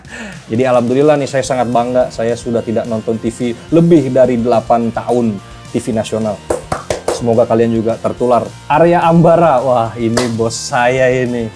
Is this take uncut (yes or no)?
yes